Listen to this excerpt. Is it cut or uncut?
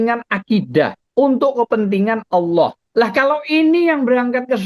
cut